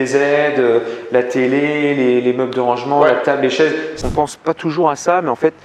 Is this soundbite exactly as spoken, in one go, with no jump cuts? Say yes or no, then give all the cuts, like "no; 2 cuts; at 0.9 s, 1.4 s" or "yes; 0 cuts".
no; 1 cut; at 3.9 s